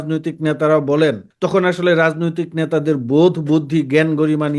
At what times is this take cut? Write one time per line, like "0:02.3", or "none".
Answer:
0:01.3